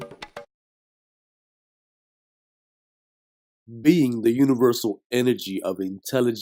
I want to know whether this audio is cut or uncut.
uncut